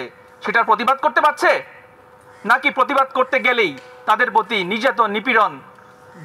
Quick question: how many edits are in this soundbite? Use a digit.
0